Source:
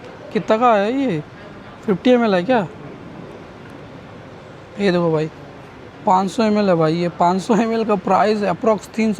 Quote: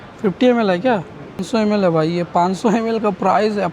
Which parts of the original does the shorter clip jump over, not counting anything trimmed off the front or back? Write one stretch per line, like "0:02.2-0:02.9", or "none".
0:03.1-0:06.3